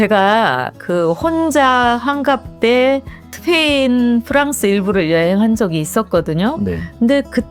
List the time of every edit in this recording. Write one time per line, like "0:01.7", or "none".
none